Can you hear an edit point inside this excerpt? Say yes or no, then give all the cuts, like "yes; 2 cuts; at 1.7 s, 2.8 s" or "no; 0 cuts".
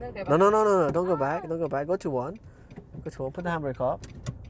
no; 0 cuts